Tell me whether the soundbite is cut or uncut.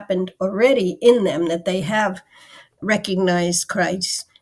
cut